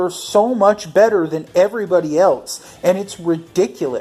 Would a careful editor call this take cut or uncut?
uncut